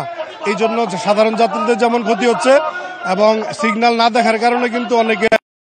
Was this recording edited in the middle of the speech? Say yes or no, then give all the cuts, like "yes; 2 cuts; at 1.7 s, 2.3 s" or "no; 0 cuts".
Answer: no; 0 cuts